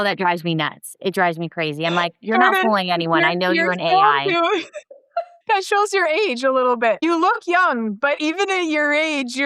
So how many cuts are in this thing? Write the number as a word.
three